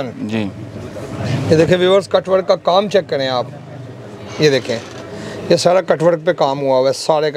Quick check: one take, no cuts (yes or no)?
yes